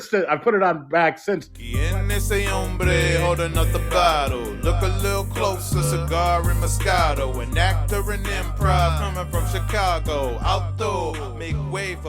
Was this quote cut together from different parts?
yes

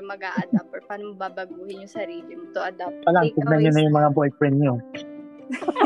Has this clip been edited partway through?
yes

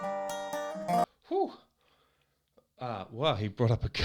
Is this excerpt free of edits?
no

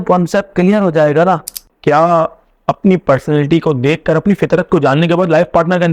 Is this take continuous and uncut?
no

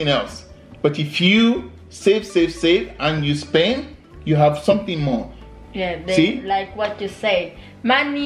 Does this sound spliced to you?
no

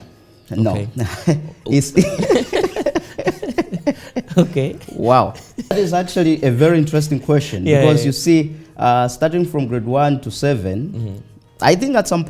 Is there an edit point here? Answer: yes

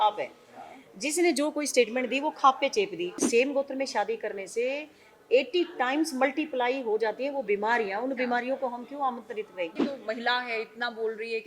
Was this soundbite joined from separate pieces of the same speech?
yes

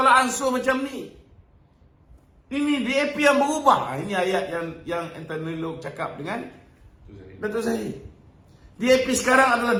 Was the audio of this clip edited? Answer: no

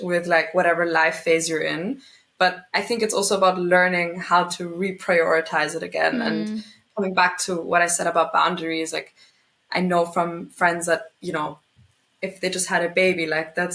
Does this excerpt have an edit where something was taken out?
no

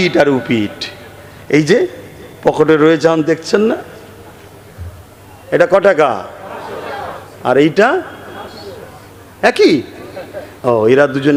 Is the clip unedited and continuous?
yes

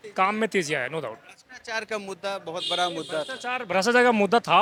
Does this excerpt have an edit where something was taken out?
no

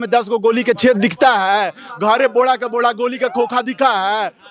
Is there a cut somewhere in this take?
no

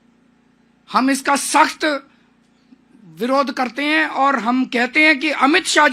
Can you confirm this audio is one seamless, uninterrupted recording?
yes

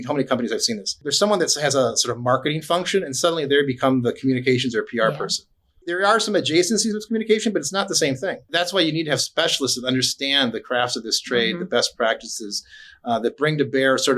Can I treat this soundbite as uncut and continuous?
no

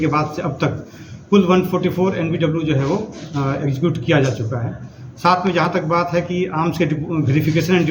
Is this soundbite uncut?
yes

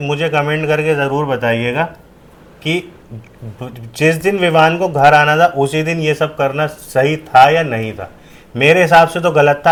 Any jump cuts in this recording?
no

